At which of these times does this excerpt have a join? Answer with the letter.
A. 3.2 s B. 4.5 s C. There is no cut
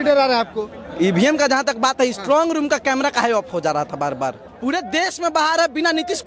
B